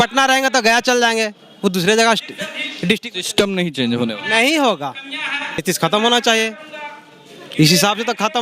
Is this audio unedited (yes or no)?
no